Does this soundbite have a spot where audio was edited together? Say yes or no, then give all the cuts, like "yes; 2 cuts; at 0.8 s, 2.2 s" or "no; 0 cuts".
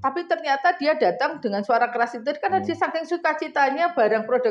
no; 0 cuts